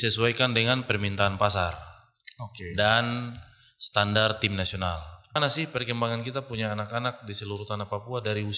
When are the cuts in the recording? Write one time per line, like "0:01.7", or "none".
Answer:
0:05.4